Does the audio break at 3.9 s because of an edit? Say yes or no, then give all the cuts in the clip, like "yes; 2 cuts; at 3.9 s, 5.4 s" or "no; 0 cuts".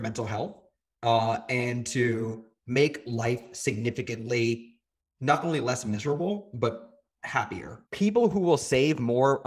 no; 1 cut; at 7.7 s